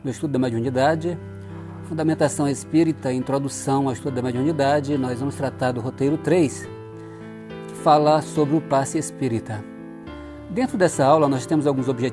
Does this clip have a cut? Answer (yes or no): yes